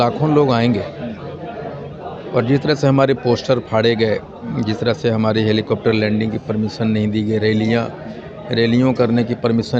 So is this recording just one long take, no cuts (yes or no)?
yes